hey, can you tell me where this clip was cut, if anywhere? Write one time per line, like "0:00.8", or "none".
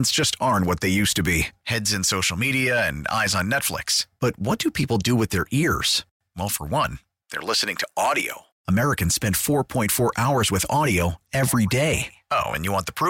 none